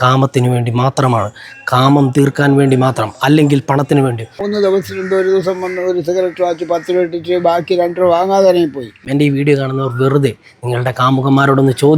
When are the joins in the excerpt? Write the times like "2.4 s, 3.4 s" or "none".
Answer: 4.4 s, 9.0 s